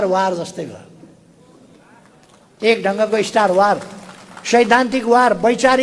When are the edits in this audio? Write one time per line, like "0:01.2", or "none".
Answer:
none